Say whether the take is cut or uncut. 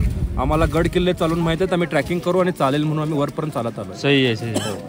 uncut